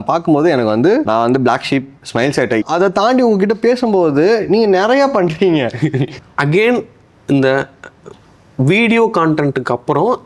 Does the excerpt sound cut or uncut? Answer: cut